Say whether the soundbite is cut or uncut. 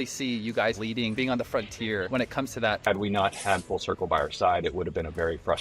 cut